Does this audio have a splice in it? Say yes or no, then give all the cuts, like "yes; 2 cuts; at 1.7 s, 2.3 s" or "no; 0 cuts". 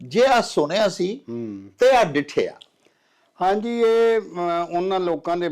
no; 0 cuts